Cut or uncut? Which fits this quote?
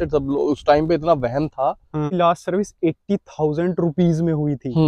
cut